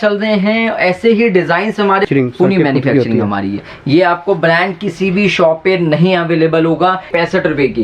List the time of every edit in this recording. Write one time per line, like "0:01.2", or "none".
0:02.0
0:07.1